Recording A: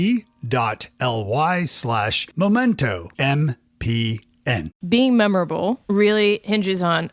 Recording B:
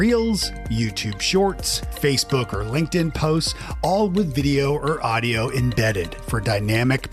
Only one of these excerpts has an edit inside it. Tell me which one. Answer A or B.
A